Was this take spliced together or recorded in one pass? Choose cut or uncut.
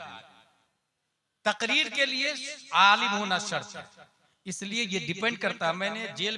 uncut